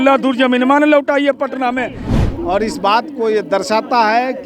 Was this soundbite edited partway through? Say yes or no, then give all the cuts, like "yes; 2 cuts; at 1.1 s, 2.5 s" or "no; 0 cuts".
yes; 1 cut; at 2.1 s